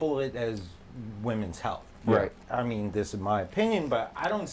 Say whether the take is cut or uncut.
cut